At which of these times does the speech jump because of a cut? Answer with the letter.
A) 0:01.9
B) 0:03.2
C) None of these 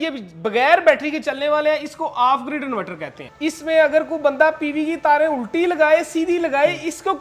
B